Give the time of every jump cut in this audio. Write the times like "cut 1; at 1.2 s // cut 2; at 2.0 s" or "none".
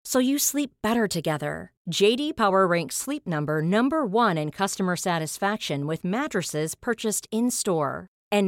none